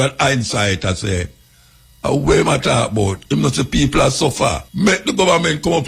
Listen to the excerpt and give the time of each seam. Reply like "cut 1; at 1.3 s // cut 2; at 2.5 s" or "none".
cut 1; at 4.7 s